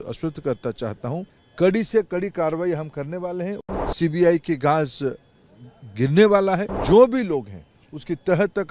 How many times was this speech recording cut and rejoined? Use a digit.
3